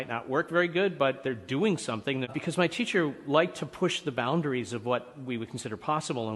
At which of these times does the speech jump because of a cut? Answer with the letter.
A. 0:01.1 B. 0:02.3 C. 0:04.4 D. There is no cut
B